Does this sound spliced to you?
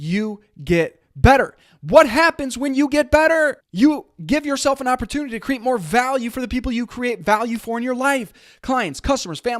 yes; 1 cut; at 3.6 s

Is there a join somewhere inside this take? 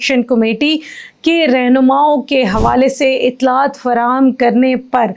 no; 0 cuts

